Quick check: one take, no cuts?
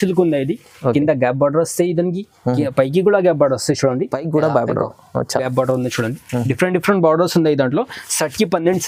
yes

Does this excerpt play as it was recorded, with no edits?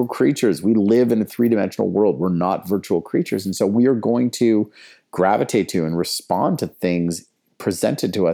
yes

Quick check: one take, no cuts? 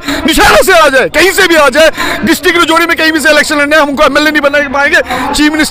yes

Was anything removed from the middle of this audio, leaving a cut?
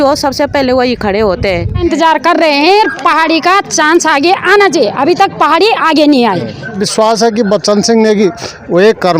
yes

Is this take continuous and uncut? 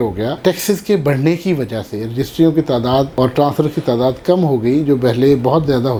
yes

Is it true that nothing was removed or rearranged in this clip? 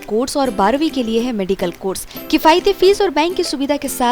yes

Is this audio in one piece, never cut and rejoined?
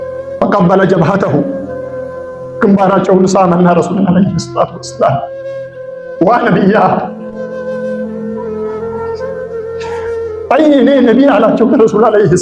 no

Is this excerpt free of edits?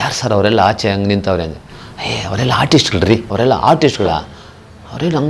no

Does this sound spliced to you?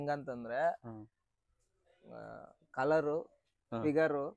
no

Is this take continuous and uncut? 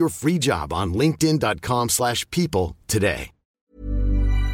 no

